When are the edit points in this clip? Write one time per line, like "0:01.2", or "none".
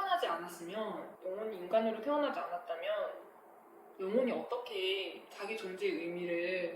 0:01.1